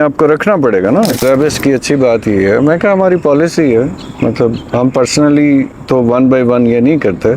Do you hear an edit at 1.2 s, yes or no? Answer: yes